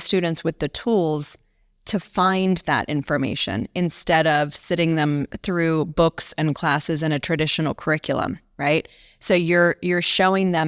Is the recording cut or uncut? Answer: uncut